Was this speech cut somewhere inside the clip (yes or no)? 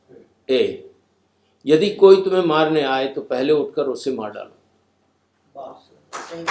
no